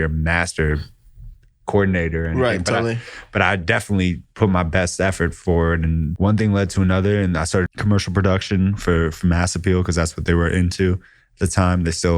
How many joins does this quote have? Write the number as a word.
two